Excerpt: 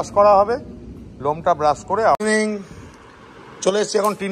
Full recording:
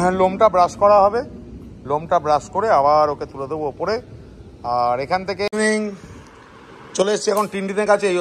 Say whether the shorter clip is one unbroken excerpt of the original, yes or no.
no